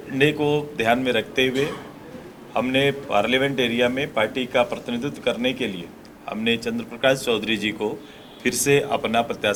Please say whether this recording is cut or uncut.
uncut